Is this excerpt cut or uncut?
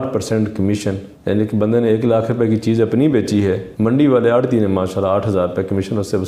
uncut